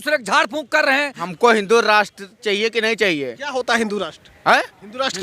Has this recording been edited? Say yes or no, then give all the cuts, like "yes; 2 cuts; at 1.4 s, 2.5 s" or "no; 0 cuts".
yes; 1 cut; at 1.2 s